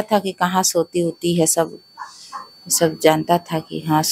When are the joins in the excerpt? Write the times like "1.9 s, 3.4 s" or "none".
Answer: none